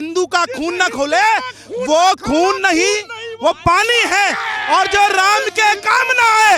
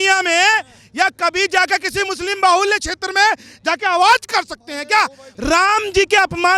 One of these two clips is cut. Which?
second; 1 cut; at 5.3 s

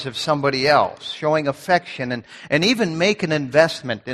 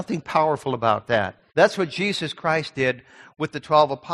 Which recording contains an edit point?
second; 1 cut; at 1.4 s

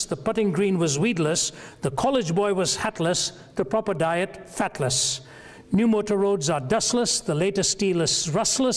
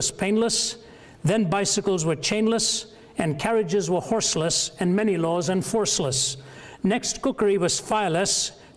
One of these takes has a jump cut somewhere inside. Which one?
second; 1 cut; at 1.2 s

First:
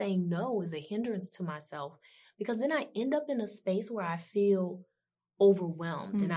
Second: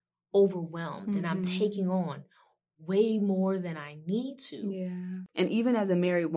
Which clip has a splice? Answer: second; 1 cut; at 5.1 s

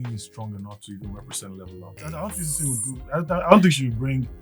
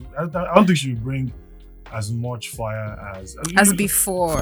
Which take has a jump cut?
first; 1 cut; at 2.0 s

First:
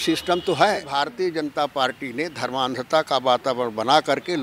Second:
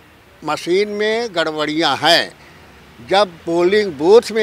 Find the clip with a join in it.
first; 1 cut; at 1.0 s

